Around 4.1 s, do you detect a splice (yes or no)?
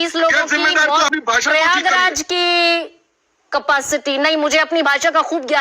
no